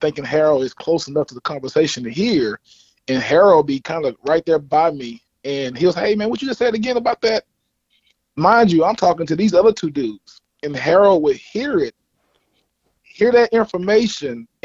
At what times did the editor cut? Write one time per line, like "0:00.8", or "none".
none

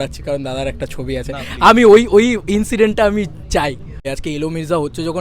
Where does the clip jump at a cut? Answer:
0:04.0

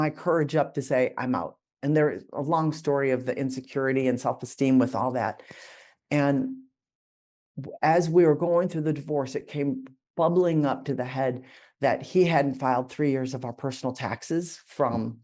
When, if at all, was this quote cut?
none

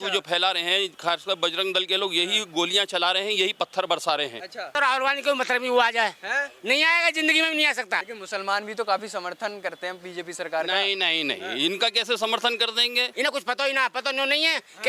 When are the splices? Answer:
0:04.7
0:08.0
0:13.0

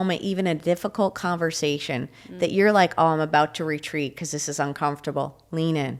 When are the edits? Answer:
none

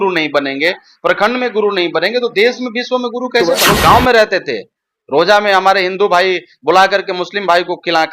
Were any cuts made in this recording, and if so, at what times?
0:03.6

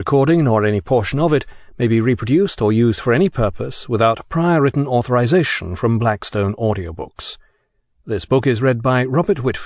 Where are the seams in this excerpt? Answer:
0:08.2

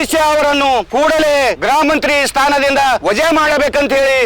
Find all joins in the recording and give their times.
0:00.9
0:01.6
0:03.0

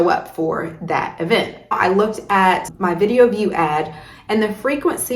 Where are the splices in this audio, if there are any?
0:01.7
0:02.7

